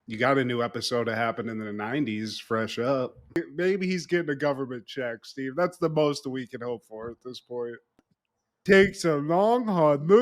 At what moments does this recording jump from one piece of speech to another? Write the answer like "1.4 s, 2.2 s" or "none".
3.4 s, 8.2 s